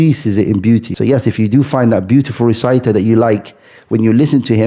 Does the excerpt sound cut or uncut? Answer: cut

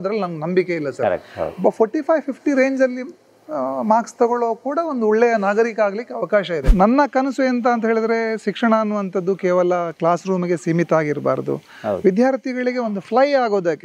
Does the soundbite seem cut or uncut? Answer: cut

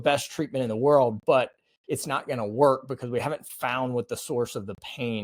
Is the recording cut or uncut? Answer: uncut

